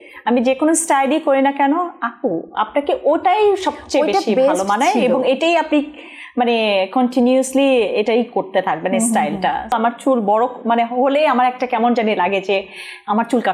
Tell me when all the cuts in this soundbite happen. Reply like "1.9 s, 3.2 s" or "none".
9.7 s